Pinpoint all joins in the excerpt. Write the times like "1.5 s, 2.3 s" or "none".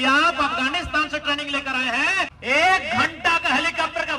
2.3 s

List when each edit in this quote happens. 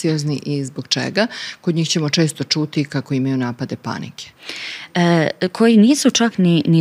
none

